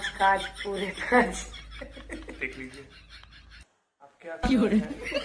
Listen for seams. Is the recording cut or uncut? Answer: cut